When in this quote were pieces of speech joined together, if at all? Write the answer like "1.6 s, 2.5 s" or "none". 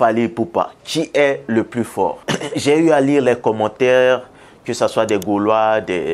2.2 s